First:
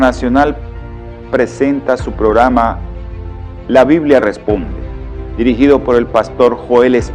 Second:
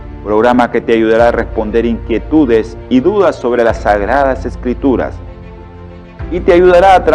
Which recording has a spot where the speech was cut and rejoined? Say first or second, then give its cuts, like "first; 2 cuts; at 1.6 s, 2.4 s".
first; 1 cut; at 1.6 s